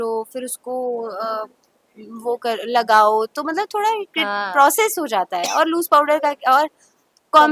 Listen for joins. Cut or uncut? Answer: uncut